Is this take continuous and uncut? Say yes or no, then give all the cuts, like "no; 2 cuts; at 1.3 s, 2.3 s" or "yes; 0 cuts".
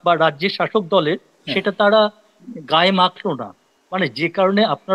yes; 0 cuts